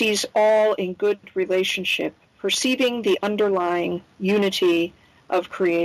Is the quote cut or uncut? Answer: cut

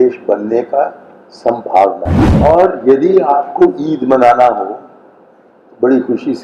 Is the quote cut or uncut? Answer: cut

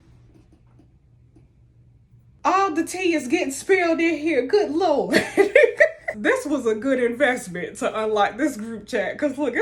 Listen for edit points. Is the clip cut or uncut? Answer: cut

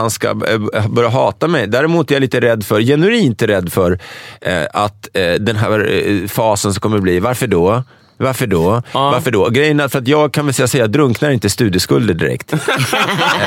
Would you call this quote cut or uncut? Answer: uncut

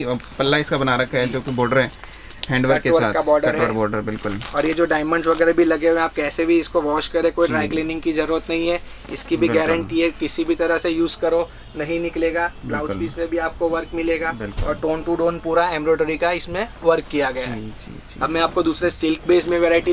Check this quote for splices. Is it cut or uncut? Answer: uncut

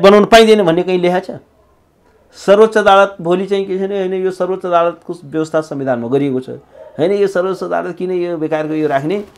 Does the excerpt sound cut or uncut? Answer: uncut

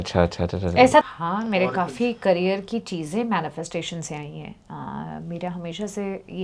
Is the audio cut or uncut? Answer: cut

